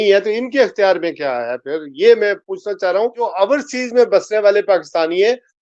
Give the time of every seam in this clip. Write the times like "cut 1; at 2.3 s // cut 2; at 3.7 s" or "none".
none